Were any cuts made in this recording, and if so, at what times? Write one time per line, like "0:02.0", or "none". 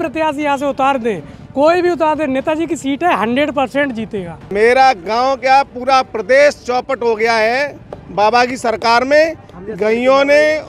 0:04.4

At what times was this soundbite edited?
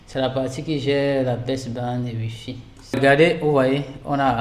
0:03.0

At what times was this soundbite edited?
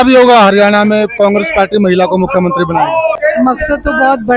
0:03.2

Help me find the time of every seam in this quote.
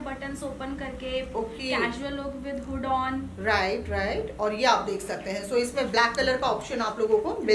none

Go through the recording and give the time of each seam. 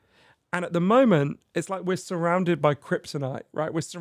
none

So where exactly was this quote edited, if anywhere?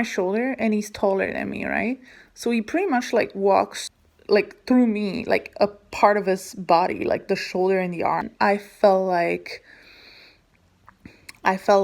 0:03.9

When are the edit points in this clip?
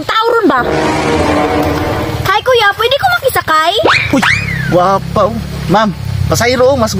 none

